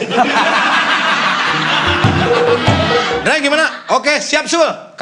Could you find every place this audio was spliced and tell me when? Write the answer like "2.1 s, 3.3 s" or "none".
3.2 s